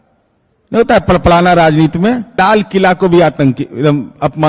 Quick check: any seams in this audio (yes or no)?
yes